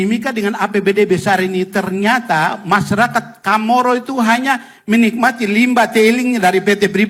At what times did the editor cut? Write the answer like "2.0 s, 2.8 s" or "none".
none